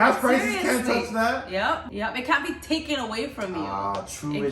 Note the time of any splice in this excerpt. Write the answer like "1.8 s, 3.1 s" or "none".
1.9 s